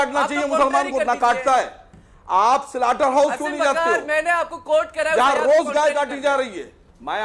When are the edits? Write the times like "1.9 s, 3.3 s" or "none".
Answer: none